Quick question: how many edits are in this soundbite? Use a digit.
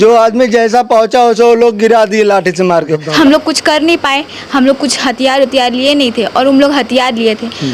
1